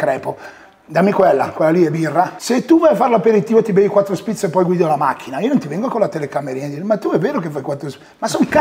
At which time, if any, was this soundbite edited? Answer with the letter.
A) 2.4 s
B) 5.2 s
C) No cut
A